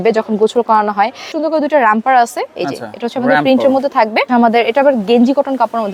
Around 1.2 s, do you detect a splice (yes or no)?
yes